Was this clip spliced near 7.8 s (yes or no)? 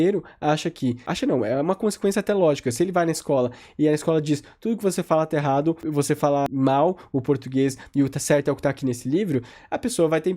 no